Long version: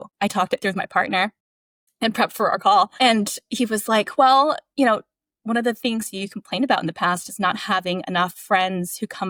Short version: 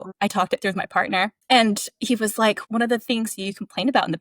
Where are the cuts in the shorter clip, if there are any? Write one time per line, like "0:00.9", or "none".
0:01.4
0:02.6